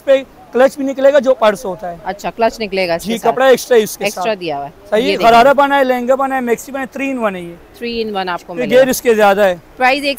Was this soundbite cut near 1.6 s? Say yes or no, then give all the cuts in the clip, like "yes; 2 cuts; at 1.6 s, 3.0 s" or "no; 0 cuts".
no; 0 cuts